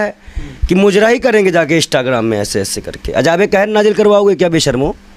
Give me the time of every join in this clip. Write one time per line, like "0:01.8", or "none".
none

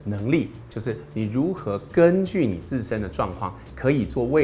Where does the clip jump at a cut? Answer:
none

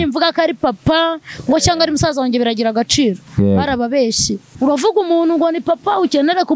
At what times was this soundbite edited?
0:04.5

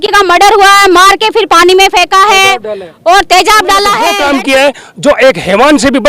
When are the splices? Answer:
0:04.1

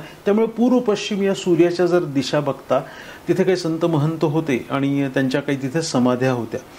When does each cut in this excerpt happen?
0:03.0

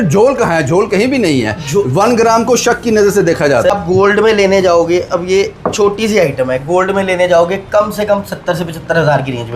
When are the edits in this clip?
0:03.7

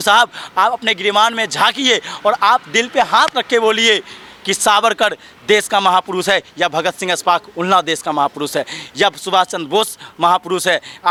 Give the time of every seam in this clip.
none

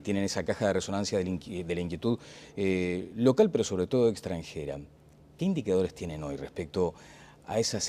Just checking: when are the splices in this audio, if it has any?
0:03.3

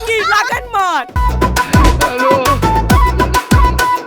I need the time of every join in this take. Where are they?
0:01.2

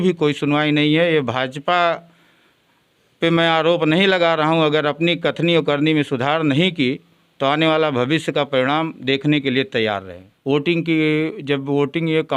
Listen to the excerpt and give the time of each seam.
0:10.2

